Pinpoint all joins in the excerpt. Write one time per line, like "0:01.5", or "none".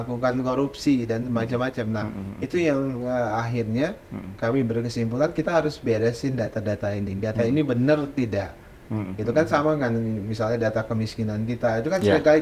none